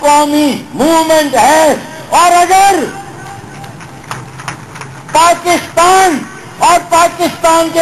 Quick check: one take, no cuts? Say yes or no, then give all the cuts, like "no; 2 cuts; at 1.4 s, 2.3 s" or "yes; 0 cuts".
yes; 0 cuts